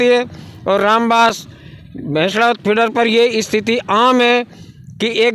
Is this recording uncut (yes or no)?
yes